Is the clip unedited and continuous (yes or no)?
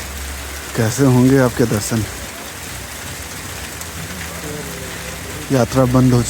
yes